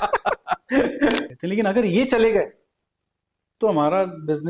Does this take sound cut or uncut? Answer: cut